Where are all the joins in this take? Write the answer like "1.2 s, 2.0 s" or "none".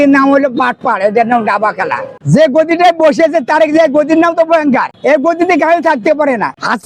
2.2 s